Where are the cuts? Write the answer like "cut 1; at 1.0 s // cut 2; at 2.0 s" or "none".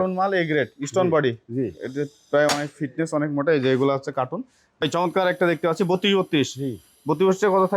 cut 1; at 4.6 s